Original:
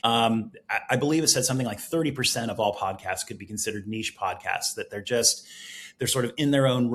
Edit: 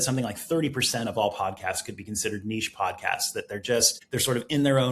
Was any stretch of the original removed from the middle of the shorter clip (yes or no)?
yes